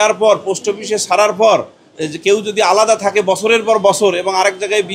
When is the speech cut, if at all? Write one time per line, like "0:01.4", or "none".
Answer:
none